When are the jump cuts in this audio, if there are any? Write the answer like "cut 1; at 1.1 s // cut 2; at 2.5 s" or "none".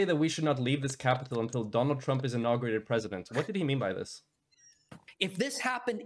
cut 1; at 5.1 s

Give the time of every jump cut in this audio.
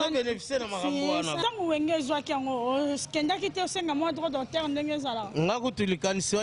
cut 1; at 1.4 s

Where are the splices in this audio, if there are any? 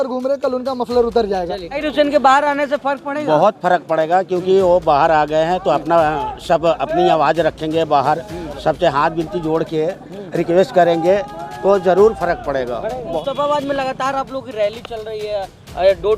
cut 1; at 1.8 s // cut 2; at 13.0 s

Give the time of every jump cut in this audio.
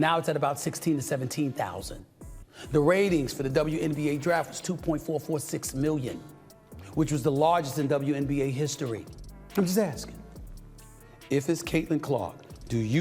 cut 1; at 9.2 s

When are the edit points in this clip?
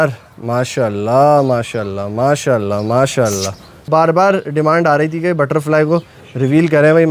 cut 1; at 3.9 s

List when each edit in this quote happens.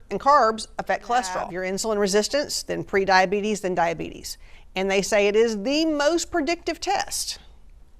cut 1; at 1.6 s

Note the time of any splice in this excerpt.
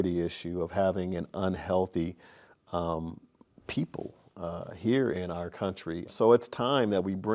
cut 1; at 6.1 s

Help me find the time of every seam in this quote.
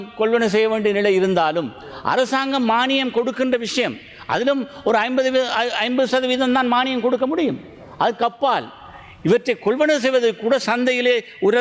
none

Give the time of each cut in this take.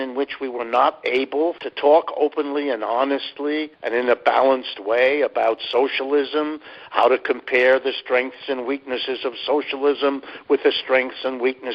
cut 1; at 1.6 s // cut 2; at 3.8 s

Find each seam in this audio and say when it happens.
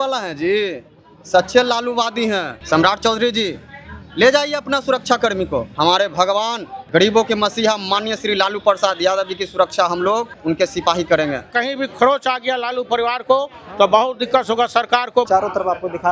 cut 1; at 2.6 s // cut 2; at 5.7 s // cut 3; at 6.7 s // cut 4; at 10.3 s // cut 5; at 11.5 s // cut 6; at 15.3 s

